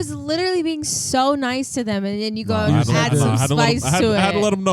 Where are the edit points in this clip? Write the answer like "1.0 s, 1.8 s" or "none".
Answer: none